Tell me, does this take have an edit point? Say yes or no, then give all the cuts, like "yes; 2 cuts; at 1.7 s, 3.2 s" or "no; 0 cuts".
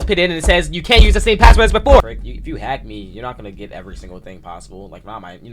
yes; 1 cut; at 2.0 s